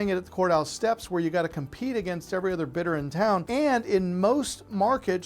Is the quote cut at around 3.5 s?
yes; 1 cut; at 3.5 s

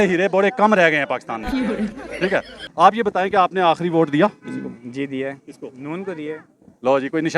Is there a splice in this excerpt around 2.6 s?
yes; 1 cut; at 2.6 s

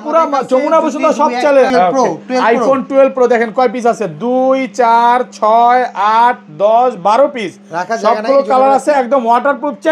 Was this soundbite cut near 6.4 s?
no; 1 cut; at 1.7 s

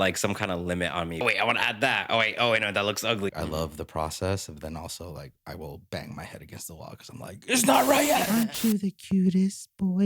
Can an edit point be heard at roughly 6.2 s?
no; 3 cuts; at 1.2 s, 3.3 s, 8.3 s

